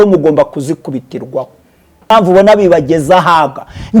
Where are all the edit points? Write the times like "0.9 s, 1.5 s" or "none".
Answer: 2.1 s